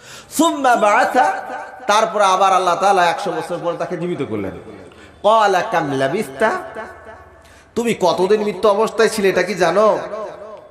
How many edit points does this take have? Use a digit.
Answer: 0